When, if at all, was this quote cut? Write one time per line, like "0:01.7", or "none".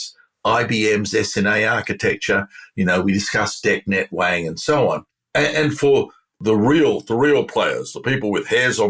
0:06.4